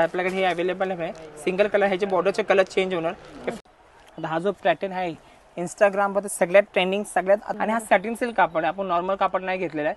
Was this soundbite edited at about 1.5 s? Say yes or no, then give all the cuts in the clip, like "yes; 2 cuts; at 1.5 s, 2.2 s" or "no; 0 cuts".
no; 2 cuts; at 3.6 s, 7.5 s